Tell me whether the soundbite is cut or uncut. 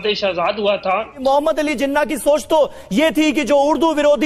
cut